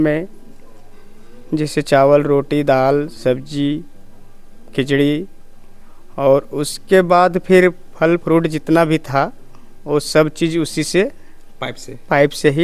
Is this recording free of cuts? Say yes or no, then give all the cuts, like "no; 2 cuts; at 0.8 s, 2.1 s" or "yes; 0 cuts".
yes; 0 cuts